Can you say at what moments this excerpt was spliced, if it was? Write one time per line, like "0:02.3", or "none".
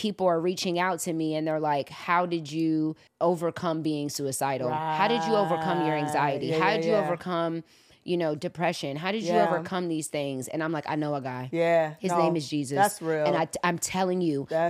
0:03.0